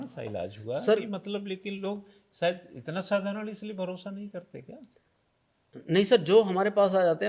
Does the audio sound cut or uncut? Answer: uncut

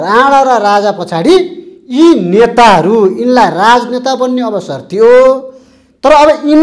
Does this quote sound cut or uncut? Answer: uncut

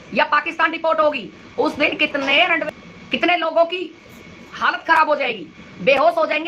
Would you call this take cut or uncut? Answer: cut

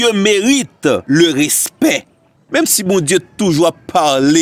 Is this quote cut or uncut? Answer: cut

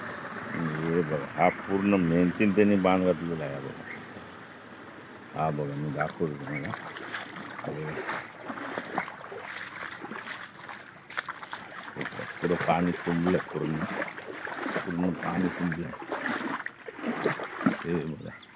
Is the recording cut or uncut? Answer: uncut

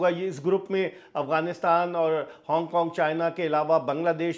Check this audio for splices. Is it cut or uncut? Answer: uncut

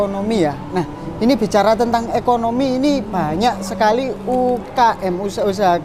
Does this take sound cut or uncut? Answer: uncut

